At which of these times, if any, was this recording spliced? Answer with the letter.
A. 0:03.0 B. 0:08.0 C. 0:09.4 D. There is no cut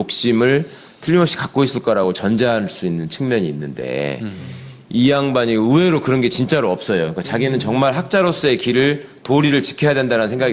B